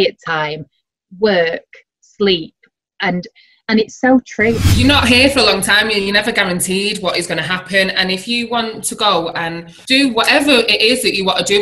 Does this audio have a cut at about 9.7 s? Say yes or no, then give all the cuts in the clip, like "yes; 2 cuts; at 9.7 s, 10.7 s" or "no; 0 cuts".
yes; 2 cuts; at 4.6 s, 9.7 s